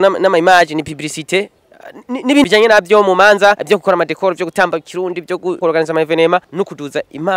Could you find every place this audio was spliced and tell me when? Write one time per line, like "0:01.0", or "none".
0:02.4
0:03.6
0:05.6
0:06.5